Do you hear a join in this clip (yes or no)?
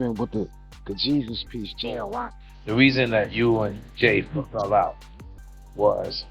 yes